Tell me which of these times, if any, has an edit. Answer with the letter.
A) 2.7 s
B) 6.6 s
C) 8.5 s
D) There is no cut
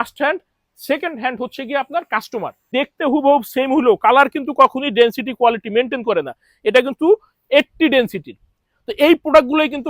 A